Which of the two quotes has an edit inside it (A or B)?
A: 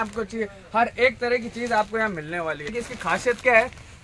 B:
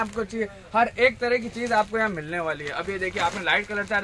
A